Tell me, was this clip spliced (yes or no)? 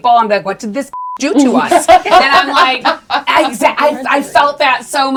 no